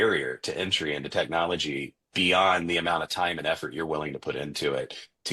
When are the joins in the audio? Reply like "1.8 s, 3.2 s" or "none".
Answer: none